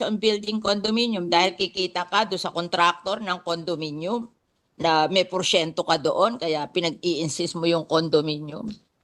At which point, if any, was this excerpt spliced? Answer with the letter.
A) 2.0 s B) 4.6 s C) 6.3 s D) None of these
D